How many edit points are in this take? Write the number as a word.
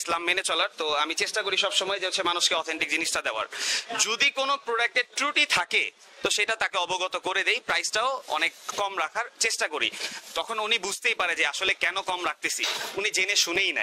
zero